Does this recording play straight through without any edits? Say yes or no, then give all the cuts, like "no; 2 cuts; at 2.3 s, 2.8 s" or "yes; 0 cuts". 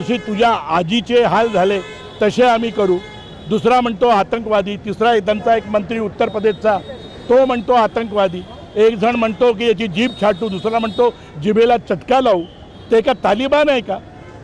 yes; 0 cuts